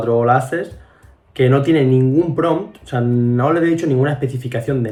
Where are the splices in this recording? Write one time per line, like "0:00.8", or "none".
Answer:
none